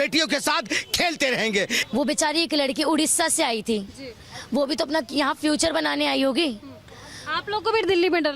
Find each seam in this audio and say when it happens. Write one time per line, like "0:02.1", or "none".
0:01.8